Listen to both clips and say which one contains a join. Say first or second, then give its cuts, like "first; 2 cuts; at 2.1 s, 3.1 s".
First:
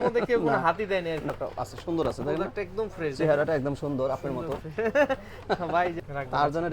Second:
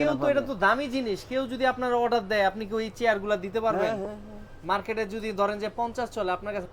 first; 2 cuts; at 1.3 s, 5.9 s